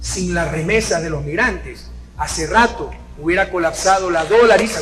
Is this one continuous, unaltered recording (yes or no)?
yes